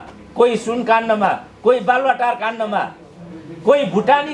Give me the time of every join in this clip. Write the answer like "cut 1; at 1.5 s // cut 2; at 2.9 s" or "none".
none